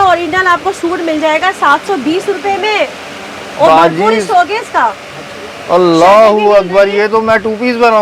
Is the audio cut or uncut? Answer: uncut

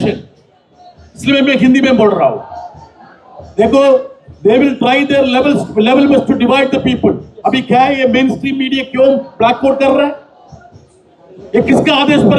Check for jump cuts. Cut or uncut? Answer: uncut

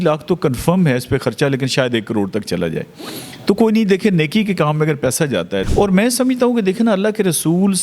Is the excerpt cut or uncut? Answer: cut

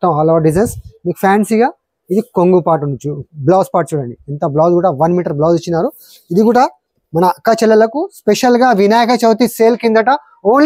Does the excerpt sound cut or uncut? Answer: uncut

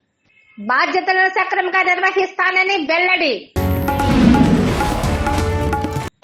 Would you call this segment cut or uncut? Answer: uncut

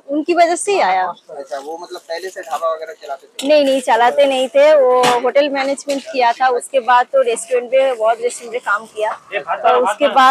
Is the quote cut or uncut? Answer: uncut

